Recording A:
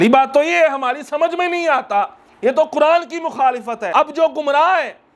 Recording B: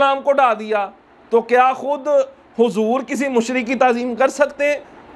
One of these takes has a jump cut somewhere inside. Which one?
A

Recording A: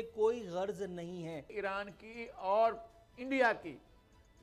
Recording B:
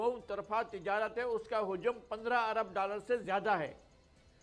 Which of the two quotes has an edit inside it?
A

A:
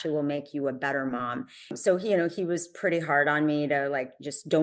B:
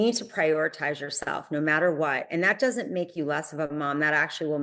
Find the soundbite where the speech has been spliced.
A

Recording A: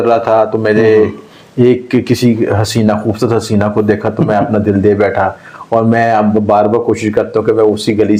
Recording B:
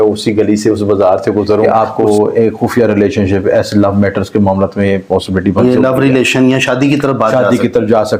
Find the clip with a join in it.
B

